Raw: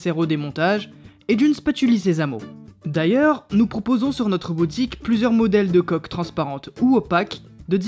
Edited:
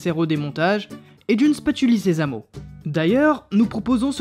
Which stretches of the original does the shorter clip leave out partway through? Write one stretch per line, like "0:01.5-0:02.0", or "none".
none